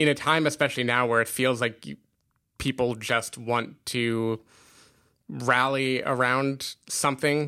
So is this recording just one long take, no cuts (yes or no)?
yes